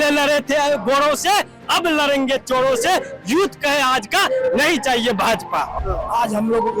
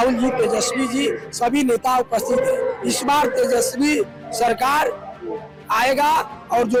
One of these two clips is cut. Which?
first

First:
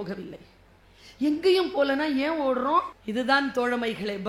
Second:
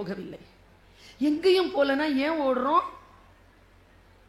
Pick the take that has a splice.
first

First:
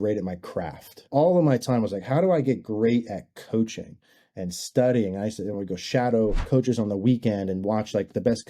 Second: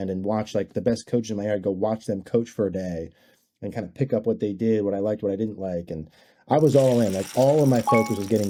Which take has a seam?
first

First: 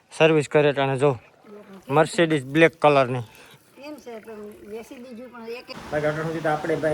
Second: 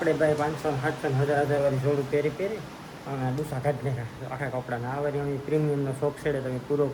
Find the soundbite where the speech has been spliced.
first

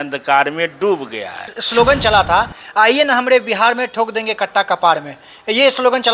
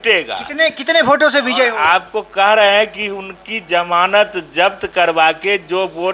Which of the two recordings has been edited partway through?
first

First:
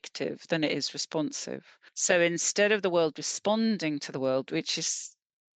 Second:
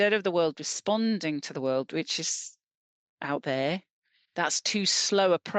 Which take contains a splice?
first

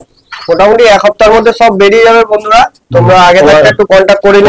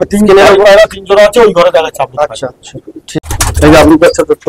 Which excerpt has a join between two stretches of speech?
second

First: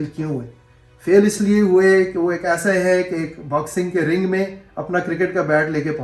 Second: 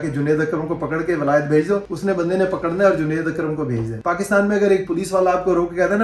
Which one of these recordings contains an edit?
second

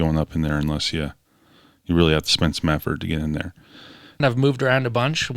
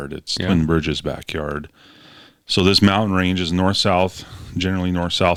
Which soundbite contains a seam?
first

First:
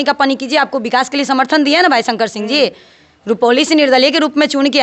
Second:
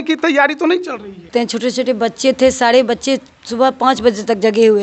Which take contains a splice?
second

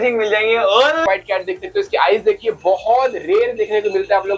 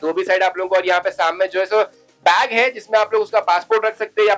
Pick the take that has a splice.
first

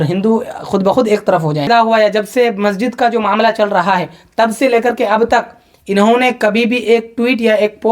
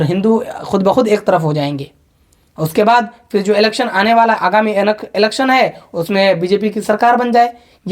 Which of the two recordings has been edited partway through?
first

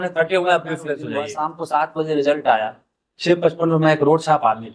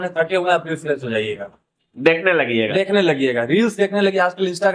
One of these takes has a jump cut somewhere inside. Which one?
first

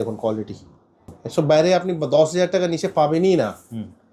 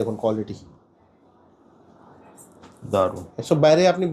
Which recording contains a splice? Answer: first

